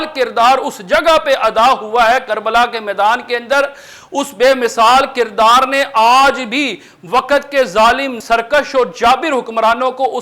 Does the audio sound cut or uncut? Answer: cut